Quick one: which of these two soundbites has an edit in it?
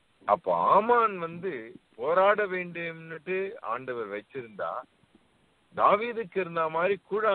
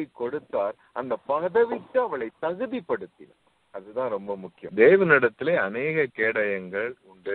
second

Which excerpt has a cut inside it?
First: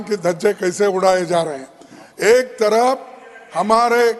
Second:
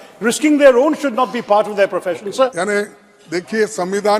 second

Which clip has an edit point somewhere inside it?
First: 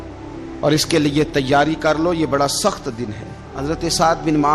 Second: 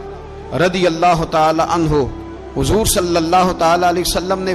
first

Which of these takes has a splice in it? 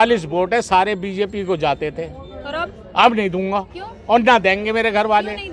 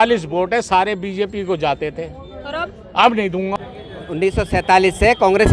second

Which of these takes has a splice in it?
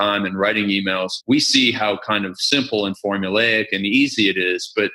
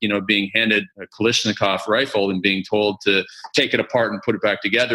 second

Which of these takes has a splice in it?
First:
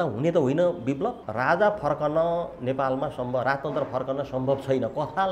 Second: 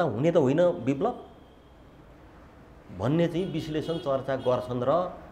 first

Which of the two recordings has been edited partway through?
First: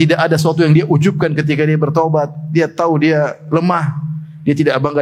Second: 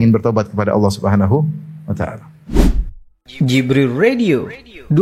second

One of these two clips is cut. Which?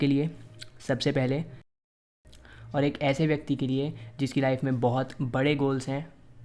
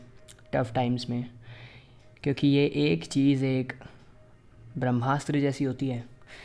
first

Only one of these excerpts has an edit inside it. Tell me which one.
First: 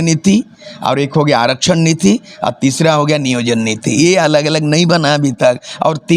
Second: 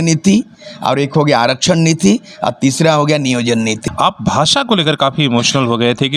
second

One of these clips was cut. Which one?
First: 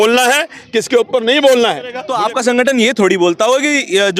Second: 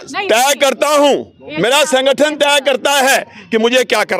first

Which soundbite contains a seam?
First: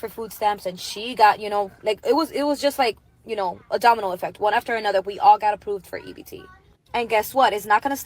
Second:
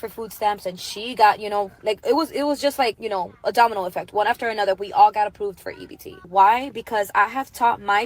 second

